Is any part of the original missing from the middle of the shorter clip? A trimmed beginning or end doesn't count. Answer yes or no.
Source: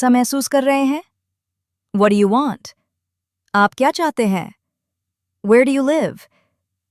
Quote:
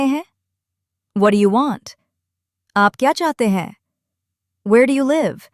no